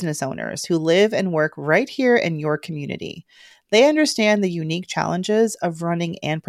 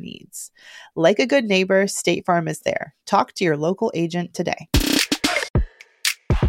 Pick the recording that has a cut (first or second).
second